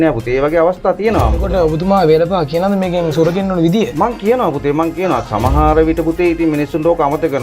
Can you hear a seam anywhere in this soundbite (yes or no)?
yes